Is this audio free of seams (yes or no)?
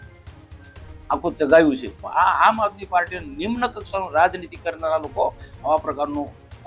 no